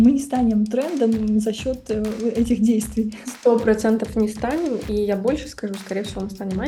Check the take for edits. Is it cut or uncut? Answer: uncut